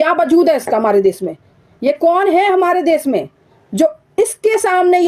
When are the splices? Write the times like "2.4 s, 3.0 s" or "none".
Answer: none